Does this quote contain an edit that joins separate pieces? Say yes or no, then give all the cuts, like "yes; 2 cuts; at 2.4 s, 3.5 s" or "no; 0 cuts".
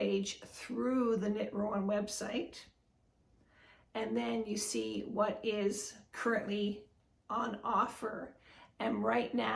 no; 0 cuts